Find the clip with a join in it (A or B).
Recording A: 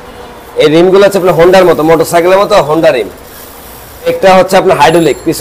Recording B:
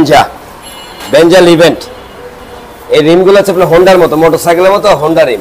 A